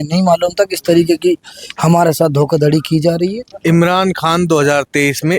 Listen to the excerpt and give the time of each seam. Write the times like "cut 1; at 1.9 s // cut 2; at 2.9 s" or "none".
cut 1; at 3.5 s